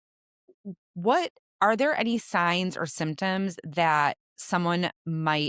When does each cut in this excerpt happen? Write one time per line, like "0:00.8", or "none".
0:01.4
0:04.3